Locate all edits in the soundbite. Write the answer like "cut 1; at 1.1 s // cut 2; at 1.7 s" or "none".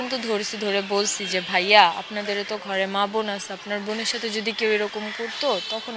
none